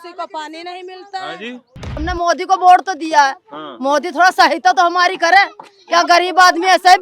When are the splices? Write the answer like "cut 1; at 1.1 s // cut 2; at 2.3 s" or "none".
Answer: cut 1; at 1.9 s